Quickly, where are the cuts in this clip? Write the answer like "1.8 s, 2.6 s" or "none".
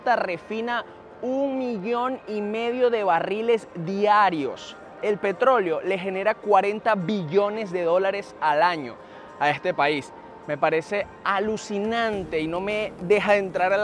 4.9 s